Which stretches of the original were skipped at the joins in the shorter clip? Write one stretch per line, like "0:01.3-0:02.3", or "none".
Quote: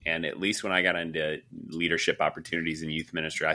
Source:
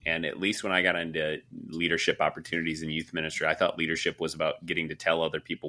none